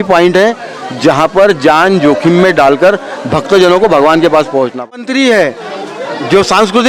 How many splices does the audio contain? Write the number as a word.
one